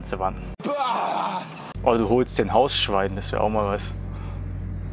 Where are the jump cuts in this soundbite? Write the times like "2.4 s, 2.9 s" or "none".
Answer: 1.6 s